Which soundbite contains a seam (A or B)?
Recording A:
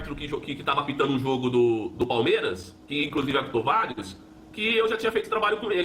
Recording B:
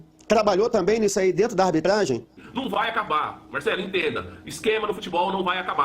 B